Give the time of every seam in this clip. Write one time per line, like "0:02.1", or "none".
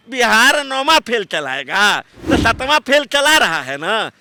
none